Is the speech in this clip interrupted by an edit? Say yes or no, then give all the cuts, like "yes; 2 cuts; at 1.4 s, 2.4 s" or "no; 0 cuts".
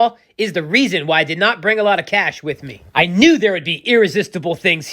no; 0 cuts